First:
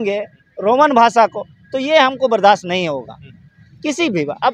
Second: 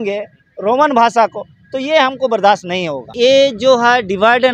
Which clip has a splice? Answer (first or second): second